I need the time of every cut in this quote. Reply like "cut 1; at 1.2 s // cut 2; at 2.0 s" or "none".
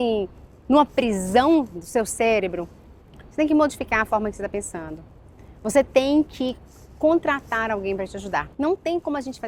cut 1; at 8.4 s